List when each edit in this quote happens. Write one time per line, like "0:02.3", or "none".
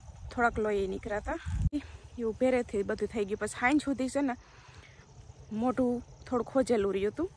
0:01.7